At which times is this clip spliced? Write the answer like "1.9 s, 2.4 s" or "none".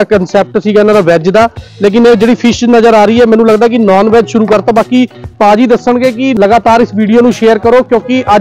6.3 s